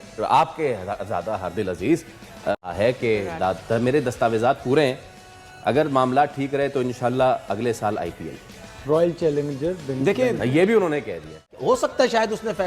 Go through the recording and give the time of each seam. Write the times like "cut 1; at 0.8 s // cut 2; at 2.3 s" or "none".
cut 1; at 2.5 s // cut 2; at 11.5 s